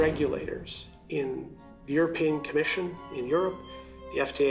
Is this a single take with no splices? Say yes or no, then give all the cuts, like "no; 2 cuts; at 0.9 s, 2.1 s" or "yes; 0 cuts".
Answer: yes; 0 cuts